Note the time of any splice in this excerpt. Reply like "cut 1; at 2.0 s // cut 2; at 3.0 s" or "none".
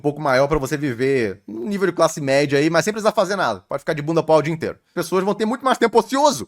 cut 1; at 5.0 s